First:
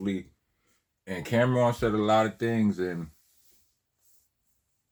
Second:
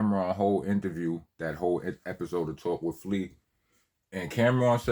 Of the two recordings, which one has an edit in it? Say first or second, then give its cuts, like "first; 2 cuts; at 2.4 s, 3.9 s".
second; 1 cut; at 1.3 s